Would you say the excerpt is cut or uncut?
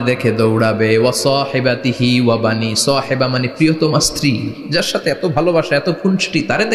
uncut